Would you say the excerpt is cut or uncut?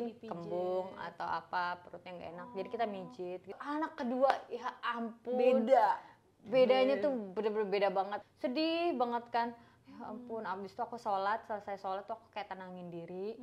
cut